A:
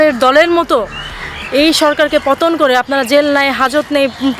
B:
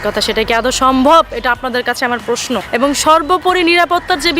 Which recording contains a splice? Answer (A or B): B